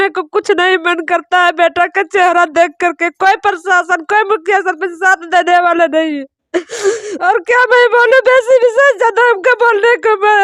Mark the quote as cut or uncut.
uncut